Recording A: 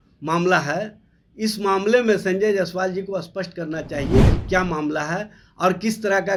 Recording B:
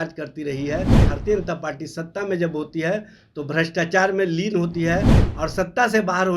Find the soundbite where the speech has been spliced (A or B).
B